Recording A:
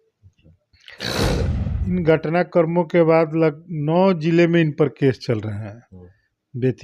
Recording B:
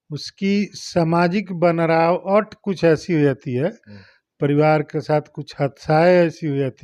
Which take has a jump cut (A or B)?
A